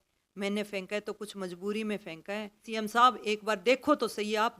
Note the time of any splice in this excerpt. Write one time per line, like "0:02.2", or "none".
0:02.7